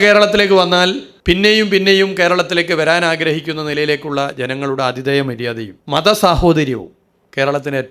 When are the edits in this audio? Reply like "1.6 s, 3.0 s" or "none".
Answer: 1.1 s, 5.7 s